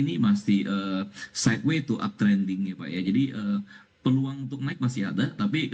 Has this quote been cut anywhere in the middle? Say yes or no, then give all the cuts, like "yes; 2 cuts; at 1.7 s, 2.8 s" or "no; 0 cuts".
no; 0 cuts